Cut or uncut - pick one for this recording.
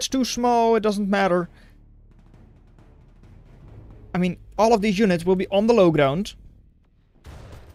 uncut